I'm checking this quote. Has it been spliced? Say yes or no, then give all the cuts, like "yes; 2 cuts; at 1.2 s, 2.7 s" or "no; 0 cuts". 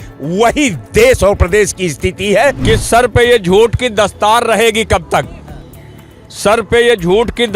yes; 1 cut; at 2.6 s